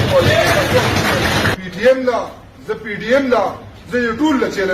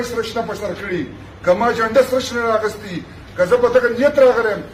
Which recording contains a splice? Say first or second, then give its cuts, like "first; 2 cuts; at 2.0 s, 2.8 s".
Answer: first; 1 cut; at 1.5 s